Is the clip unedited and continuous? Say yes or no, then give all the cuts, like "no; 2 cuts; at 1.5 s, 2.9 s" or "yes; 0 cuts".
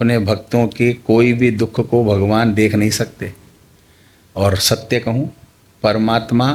yes; 0 cuts